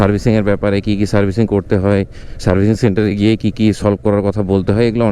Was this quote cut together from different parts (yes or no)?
no